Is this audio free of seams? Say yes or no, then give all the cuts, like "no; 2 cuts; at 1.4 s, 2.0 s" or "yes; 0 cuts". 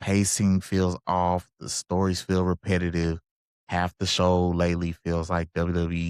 yes; 0 cuts